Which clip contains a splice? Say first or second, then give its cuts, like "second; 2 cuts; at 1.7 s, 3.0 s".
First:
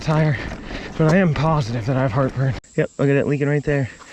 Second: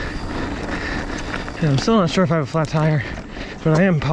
first; 1 cut; at 2.6 s